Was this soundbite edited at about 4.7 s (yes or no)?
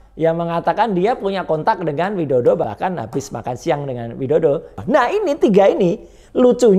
yes